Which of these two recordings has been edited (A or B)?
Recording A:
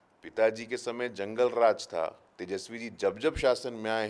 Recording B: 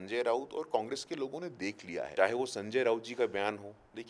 B